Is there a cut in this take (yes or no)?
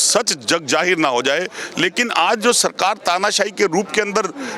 yes